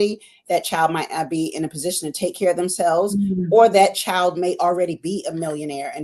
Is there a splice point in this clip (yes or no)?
no